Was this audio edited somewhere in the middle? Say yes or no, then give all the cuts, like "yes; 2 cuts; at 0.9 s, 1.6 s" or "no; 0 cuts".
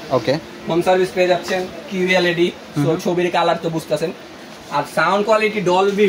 no; 0 cuts